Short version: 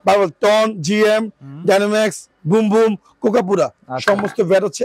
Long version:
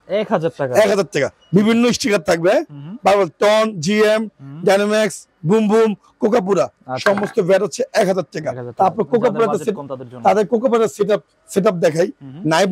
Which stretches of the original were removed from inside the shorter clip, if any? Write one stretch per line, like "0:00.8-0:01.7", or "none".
none